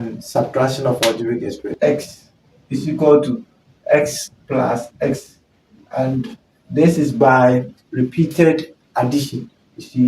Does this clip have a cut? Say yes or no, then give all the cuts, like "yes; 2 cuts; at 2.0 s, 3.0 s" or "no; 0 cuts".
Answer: yes; 1 cut; at 1.8 s